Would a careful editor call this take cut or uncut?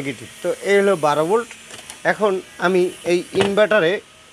uncut